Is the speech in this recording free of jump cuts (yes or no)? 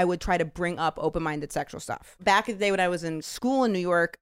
no